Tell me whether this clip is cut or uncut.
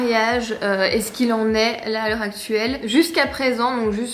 uncut